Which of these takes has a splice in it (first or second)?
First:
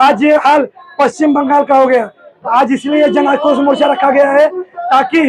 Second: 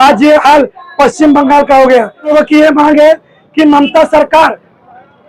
second